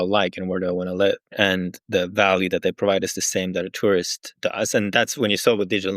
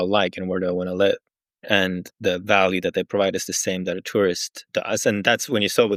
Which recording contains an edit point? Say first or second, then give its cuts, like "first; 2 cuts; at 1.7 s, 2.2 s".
first; 1 cut; at 1.3 s